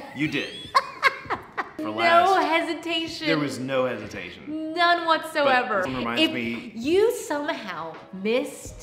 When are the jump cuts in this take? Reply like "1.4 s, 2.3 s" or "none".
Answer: 1.8 s, 5.9 s